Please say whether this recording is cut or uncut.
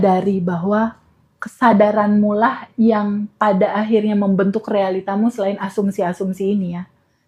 uncut